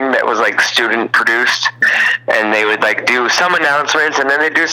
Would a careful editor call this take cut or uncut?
uncut